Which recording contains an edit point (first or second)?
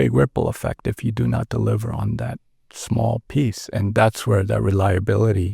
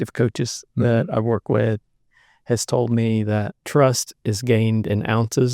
second